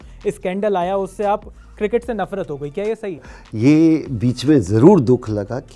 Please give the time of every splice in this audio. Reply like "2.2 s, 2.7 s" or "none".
3.2 s